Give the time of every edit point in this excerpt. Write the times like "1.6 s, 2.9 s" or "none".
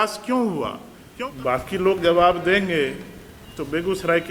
1.0 s